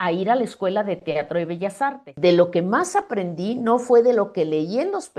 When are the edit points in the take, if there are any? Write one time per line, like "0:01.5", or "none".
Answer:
0:02.1